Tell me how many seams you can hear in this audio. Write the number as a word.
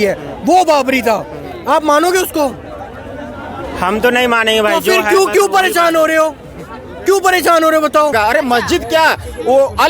one